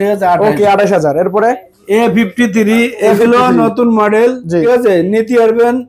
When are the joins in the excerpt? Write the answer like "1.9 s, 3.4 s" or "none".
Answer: 1.7 s, 4.6 s